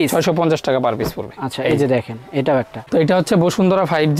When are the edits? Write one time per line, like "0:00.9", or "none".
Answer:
0:02.8